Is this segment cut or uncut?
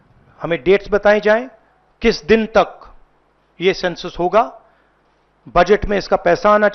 uncut